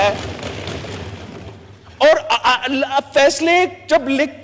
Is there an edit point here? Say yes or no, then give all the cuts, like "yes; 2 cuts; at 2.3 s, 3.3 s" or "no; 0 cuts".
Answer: no; 0 cuts